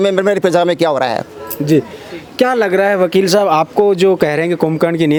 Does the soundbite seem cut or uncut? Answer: uncut